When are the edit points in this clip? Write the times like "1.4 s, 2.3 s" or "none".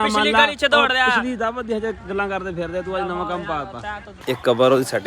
4.1 s